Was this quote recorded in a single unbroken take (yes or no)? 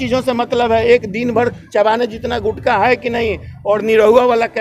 yes